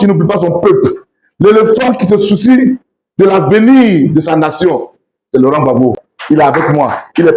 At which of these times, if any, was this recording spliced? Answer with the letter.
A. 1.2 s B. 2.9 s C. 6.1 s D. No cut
C